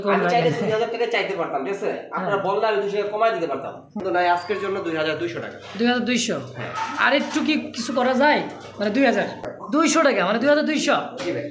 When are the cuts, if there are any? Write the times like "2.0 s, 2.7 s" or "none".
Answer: 4.0 s, 9.5 s